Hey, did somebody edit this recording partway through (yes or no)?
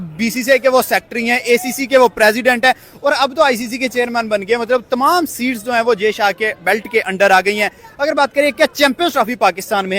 no